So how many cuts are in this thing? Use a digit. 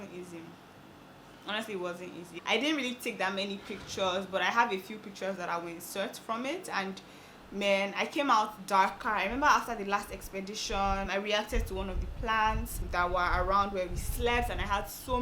0